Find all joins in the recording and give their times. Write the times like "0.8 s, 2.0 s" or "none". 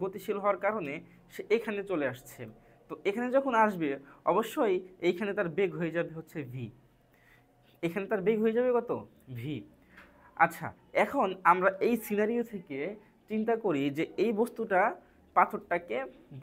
none